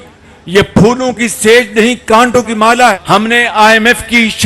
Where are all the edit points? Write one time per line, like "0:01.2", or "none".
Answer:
0:03.0